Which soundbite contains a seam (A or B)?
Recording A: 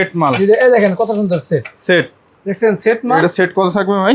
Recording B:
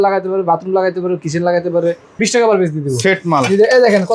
B